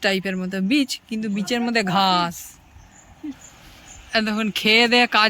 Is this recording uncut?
no; 1 cut; at 3.6 s

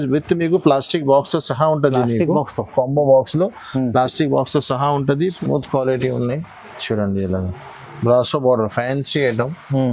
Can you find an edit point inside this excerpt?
yes; 1 cut; at 5.4 s

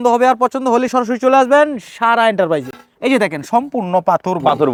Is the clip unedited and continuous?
yes; 0 cuts

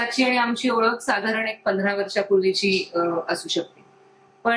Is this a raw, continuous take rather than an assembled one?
yes; 0 cuts

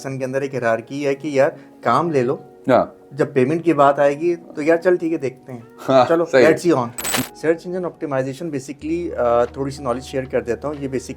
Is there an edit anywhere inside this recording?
yes; 1 cut; at 7.0 s

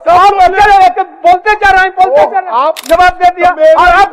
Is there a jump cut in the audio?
yes; 1 cut; at 2.8 s

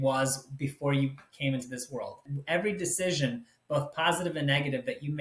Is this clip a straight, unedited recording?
no; 1 cut; at 2.3 s

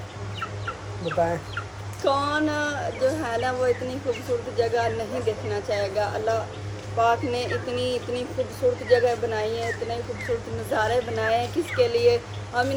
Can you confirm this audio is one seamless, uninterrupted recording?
yes; 0 cuts

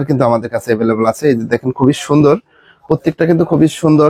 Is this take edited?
no; 0 cuts

